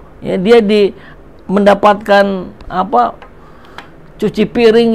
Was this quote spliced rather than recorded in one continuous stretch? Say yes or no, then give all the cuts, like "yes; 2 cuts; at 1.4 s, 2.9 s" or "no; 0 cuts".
no; 0 cuts